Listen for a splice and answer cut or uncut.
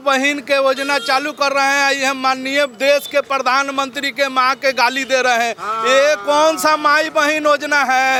uncut